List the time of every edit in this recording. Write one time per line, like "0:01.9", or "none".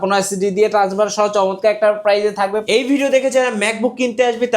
0:02.6